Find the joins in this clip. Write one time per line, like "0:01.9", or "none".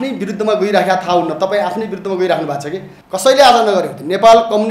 0:02.9